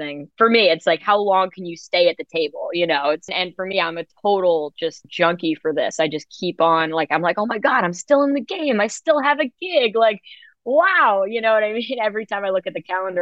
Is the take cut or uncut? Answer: cut